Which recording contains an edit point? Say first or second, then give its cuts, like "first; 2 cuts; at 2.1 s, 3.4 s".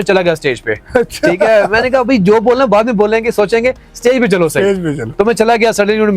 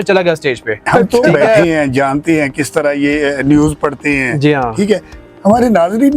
second; 1 cut; at 1.6 s